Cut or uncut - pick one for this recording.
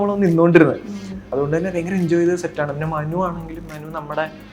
cut